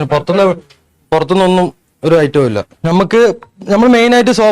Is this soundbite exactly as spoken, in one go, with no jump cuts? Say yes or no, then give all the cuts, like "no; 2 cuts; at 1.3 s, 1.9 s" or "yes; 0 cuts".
no; 1 cut; at 2.7 s